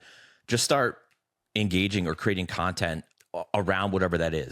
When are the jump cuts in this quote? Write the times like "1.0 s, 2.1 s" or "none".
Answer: 3.0 s